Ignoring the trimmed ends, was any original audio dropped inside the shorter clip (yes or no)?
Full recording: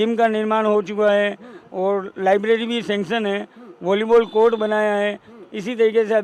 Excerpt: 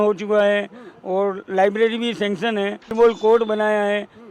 yes